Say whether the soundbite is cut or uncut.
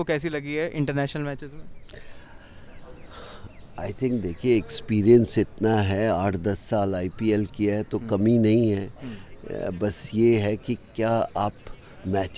uncut